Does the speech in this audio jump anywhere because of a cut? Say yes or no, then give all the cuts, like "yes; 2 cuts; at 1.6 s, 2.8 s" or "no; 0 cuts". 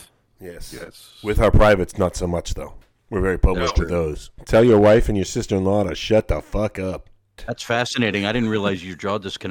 yes; 2 cuts; at 4.3 s, 7.5 s